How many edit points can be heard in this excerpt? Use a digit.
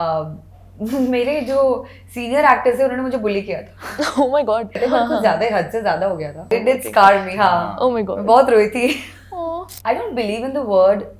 3